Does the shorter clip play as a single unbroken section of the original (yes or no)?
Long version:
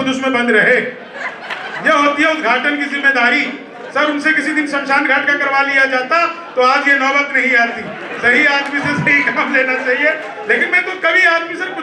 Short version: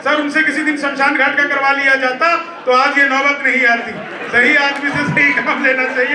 yes